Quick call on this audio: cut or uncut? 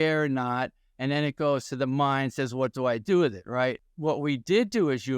cut